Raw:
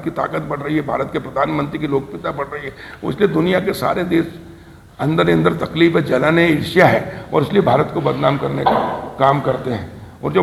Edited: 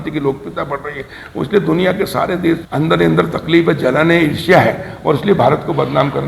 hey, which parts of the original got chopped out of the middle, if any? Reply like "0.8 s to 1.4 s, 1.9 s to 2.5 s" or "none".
4.3 s to 4.9 s